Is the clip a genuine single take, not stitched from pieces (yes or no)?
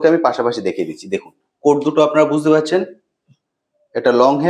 yes